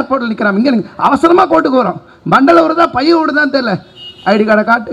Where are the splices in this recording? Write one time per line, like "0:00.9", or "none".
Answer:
none